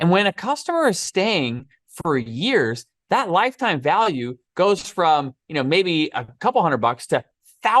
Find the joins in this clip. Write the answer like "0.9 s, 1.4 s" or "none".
6.3 s